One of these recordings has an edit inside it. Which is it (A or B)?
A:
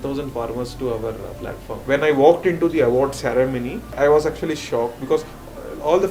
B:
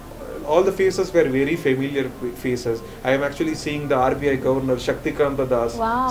A